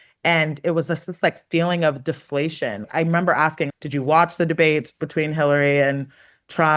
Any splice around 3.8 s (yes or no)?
yes